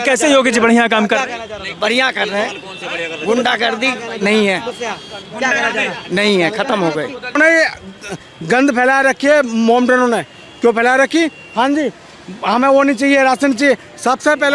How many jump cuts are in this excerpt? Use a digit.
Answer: 1